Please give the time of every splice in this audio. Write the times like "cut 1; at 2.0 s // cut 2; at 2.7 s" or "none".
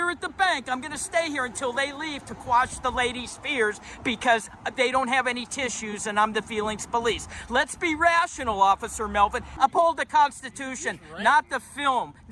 cut 1; at 9.5 s